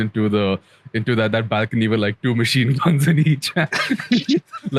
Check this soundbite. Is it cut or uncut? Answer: uncut